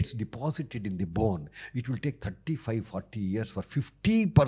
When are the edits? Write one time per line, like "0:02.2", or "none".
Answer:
none